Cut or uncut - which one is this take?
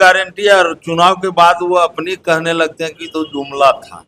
uncut